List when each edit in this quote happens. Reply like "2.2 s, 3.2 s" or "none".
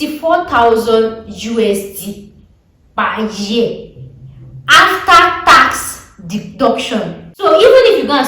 7.3 s